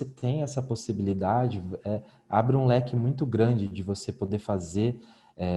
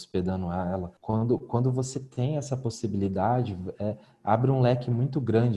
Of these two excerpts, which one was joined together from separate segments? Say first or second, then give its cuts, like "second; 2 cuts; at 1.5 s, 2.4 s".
second; 1 cut; at 0.9 s